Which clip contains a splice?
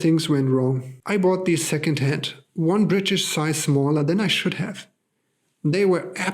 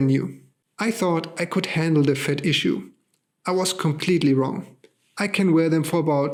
first; 1 cut; at 0.9 s

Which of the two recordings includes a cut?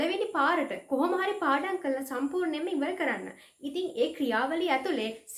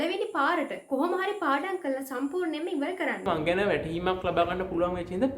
second; 1 cut; at 3.3 s

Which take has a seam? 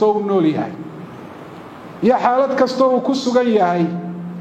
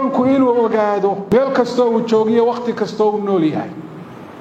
second; 1 cut; at 1.2 s

